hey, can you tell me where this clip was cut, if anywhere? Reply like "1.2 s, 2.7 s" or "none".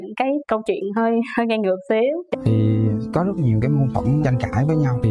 2.3 s